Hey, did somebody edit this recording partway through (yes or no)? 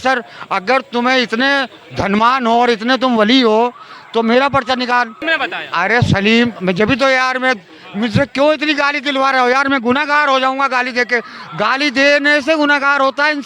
yes